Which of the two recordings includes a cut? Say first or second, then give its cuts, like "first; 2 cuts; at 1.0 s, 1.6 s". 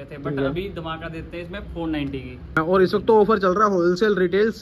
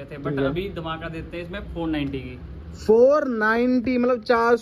first; 1 cut; at 2.6 s